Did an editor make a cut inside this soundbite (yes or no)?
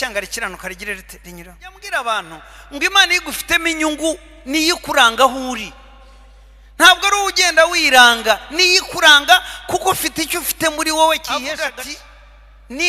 yes